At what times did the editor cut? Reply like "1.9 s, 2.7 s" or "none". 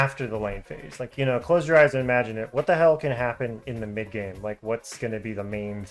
1.1 s